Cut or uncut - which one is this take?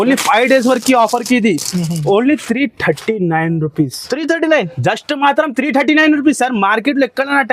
uncut